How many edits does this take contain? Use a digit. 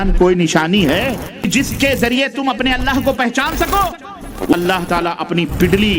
2